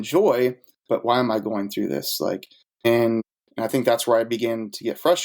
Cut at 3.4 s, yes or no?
yes